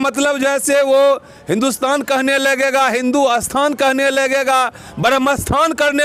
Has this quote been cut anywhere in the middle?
no; 0 cuts

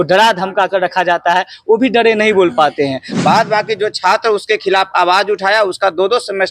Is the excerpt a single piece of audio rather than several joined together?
no; 1 cut; at 3.1 s

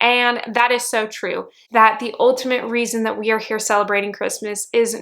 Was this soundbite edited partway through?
yes; 1 cut; at 1.5 s

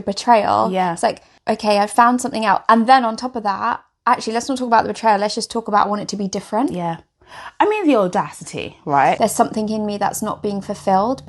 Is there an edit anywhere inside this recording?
yes; 2 cuts; at 1.3 s, 9.2 s

